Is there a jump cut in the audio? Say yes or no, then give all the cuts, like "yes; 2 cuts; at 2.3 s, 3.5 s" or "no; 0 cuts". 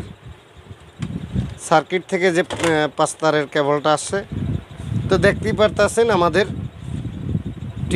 yes; 1 cut; at 4.4 s